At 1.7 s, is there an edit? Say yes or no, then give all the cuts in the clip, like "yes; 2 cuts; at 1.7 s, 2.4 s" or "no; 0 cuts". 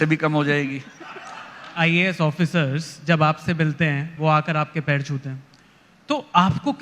yes; 2 cuts; at 1.7 s, 4.1 s